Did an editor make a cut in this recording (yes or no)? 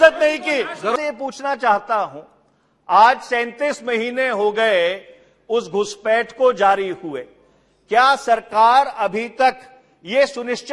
yes